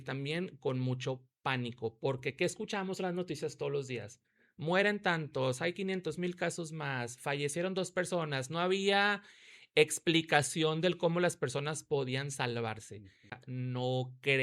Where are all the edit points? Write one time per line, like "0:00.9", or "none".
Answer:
0:13.4